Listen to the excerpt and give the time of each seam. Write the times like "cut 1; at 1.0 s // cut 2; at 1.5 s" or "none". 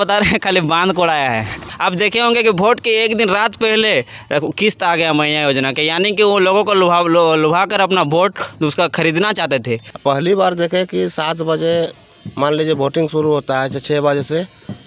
cut 1; at 1.6 s // cut 2; at 9.9 s